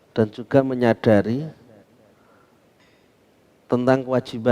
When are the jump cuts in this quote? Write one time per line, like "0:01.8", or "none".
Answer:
none